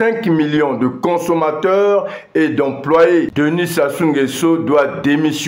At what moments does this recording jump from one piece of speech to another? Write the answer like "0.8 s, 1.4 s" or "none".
3.3 s